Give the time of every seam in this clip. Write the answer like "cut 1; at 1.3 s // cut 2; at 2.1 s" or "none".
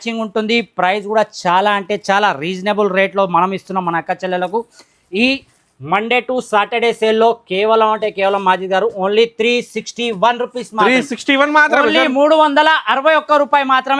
none